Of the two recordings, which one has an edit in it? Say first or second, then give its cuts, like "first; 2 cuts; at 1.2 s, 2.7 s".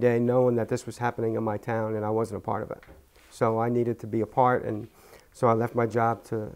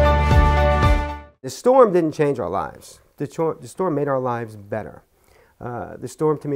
second; 1 cut; at 1.5 s